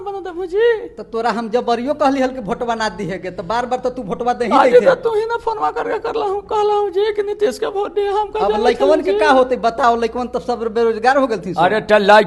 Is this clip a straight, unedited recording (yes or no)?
yes